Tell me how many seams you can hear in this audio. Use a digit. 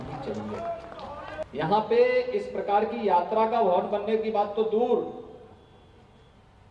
1